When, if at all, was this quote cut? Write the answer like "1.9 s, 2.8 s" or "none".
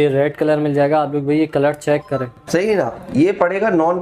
2.4 s